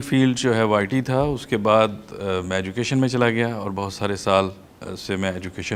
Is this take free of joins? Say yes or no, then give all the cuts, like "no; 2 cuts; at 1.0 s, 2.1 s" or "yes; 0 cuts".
yes; 0 cuts